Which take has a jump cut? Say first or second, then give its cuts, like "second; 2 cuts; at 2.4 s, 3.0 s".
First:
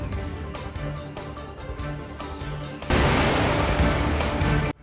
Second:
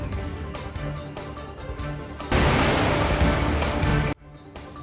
second; 1 cut; at 2.3 s